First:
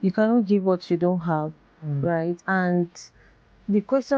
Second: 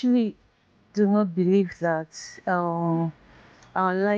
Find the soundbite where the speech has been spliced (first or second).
first